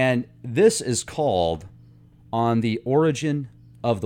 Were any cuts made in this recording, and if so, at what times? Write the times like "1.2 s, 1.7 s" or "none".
none